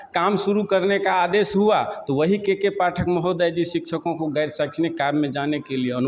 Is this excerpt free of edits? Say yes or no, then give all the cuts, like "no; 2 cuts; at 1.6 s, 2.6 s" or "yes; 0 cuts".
yes; 0 cuts